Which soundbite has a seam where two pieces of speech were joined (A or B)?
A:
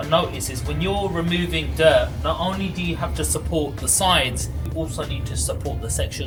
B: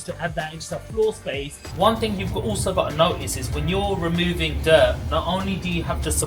B